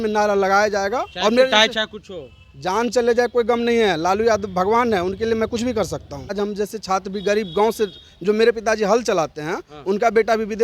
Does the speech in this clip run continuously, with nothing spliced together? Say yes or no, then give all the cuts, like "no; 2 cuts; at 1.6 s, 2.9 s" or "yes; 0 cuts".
no; 1 cut; at 6.3 s